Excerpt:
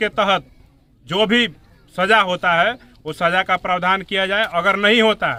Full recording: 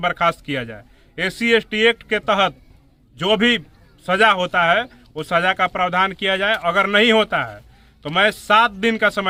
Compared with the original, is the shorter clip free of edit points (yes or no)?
yes